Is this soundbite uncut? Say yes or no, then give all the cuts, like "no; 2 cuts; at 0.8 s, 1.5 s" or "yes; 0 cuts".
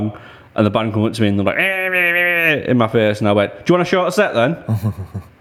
yes; 0 cuts